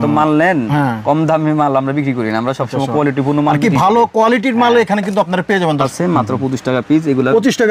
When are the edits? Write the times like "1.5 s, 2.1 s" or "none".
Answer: 5.9 s